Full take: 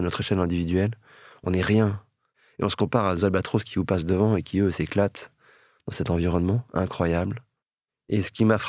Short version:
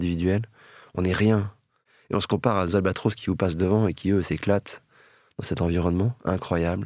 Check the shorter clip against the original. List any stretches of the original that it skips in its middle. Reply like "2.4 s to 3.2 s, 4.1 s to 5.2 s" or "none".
none